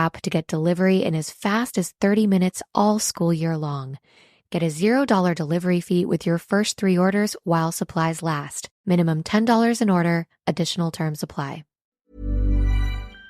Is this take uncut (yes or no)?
no